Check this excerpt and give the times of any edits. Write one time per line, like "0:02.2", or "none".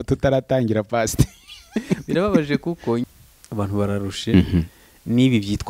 0:03.0